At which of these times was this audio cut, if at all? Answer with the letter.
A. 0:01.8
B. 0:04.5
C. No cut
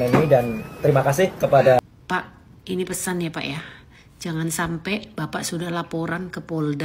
A